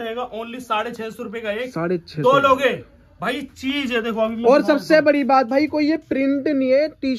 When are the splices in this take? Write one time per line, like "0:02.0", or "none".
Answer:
none